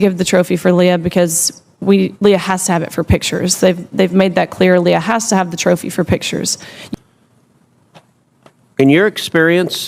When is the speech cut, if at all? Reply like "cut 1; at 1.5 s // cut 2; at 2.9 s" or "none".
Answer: cut 1; at 6.8 s